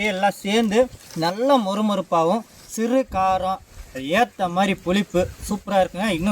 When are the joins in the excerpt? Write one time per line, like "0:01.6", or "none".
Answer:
0:01.0
0:03.7